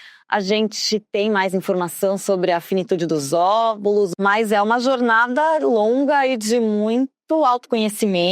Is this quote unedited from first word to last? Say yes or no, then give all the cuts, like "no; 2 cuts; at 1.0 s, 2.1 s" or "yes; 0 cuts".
no; 1 cut; at 4.1 s